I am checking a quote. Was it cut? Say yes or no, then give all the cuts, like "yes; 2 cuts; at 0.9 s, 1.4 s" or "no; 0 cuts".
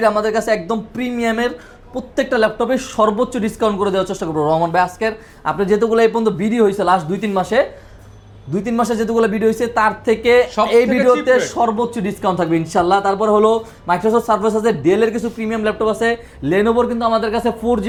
no; 0 cuts